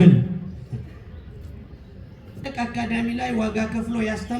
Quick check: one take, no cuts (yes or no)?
no